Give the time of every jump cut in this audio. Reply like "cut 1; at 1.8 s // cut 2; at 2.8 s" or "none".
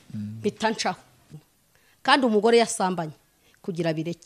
cut 1; at 1.4 s